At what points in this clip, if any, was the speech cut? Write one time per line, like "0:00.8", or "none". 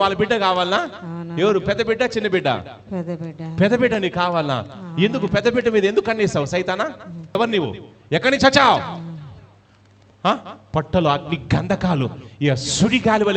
none